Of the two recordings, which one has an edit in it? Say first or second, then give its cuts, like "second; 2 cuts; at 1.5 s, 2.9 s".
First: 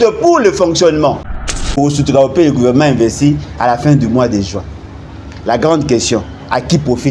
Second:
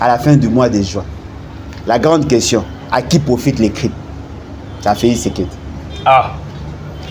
first; 1 cut; at 1.4 s